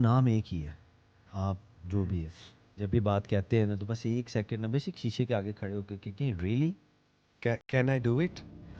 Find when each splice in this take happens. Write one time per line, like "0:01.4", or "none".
0:01.3

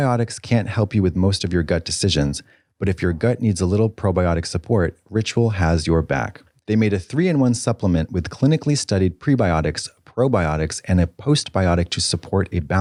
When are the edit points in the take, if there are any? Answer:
none

